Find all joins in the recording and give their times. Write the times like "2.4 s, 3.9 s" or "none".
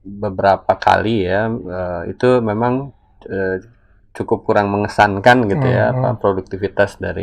none